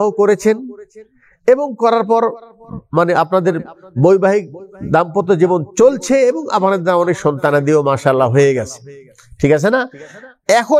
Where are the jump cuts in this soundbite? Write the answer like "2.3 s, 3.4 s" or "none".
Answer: none